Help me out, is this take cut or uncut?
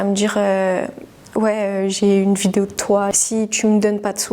cut